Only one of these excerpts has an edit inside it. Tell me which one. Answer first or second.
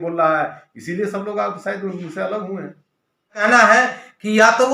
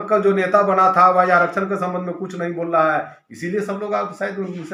first